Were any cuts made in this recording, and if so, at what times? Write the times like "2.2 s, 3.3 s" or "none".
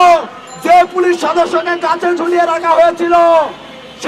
none